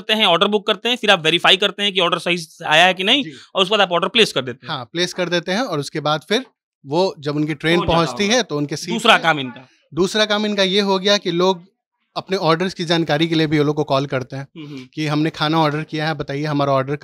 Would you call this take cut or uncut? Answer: uncut